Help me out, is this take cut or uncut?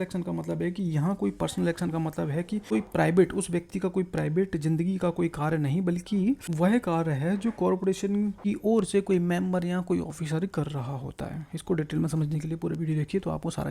cut